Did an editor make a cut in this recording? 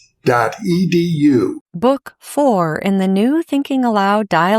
yes; 1 cut; at 1.6 s

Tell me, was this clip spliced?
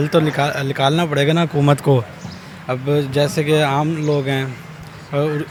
no; 0 cuts

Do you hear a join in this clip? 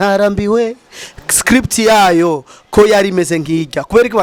no; 0 cuts

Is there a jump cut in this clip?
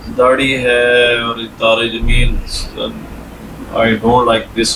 no; 0 cuts

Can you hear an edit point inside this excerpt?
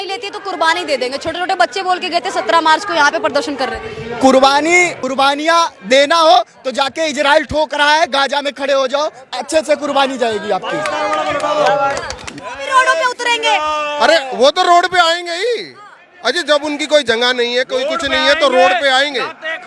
yes; 1 cut; at 12.3 s

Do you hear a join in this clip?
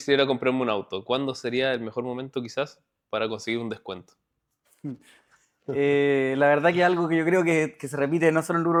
no; 0 cuts

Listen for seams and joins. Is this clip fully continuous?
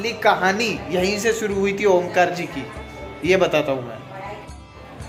yes; 0 cuts

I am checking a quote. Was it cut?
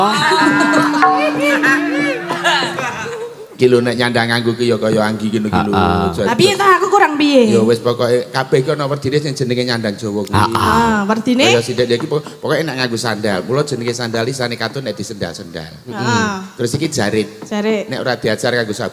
yes; 1 cut; at 2.7 s

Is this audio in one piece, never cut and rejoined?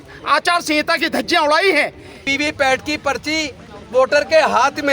no; 1 cut; at 2.2 s

